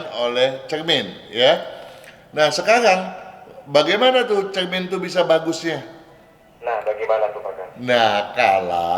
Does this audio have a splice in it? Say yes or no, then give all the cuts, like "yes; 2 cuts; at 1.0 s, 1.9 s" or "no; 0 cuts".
no; 0 cuts